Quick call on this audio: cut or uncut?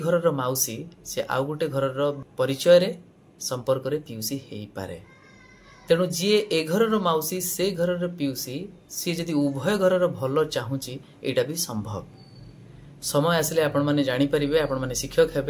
cut